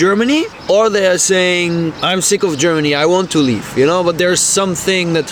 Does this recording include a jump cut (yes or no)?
no